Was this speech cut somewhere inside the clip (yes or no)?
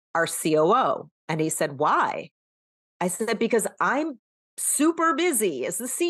yes